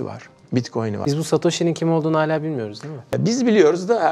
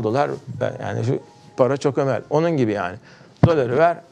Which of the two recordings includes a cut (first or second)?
first